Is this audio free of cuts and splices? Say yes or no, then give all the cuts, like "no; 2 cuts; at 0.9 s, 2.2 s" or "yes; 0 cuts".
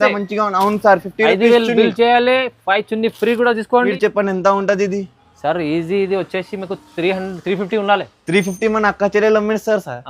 no; 1 cut; at 3.9 s